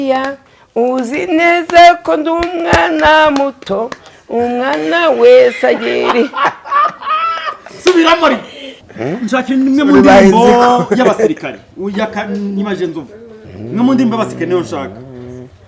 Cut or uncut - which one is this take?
cut